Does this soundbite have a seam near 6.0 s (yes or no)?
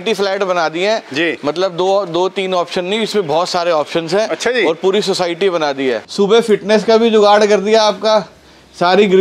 yes